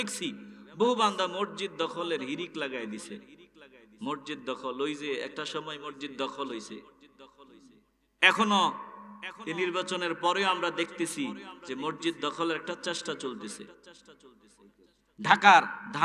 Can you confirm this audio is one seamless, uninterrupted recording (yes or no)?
yes